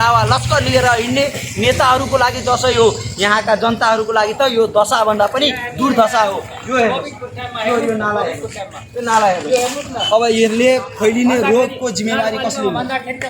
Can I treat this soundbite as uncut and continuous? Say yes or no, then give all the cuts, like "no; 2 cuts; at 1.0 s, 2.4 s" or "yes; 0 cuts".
yes; 0 cuts